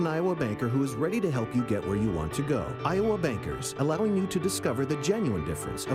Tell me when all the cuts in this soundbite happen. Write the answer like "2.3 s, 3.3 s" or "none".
none